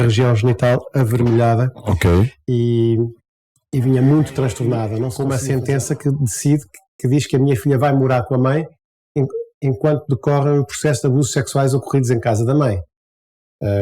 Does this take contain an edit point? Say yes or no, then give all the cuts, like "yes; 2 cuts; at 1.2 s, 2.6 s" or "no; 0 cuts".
yes; 1 cut; at 5.1 s